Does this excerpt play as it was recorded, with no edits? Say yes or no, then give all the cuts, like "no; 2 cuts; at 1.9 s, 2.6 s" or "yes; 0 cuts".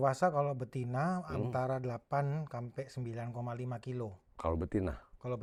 yes; 0 cuts